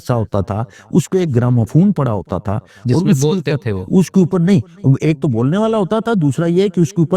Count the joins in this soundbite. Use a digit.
0